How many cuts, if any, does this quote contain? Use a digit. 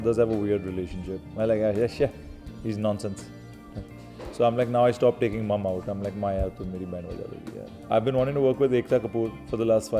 1